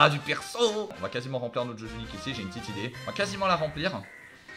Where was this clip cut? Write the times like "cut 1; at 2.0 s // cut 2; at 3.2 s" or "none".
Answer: cut 1; at 1.0 s // cut 2; at 3.0 s